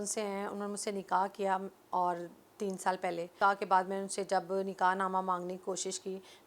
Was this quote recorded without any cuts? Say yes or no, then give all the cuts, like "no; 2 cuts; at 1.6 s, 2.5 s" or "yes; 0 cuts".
no; 1 cut; at 3.3 s